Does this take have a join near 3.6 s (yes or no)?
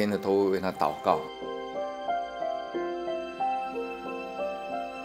no